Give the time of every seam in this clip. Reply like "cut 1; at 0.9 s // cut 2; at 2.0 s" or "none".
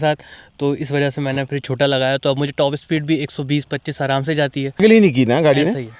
cut 1; at 4.8 s